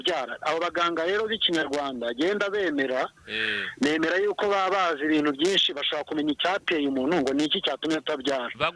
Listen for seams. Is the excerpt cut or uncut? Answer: uncut